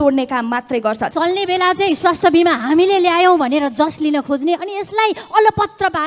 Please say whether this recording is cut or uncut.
cut